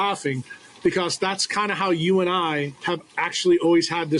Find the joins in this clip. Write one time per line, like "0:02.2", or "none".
0:02.7